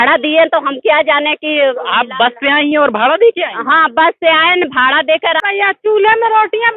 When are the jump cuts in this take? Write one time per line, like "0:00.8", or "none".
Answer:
0:05.4